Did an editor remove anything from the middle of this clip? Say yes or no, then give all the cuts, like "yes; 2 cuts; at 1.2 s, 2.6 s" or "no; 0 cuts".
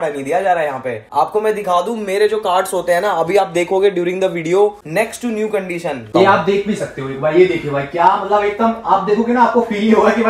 no; 0 cuts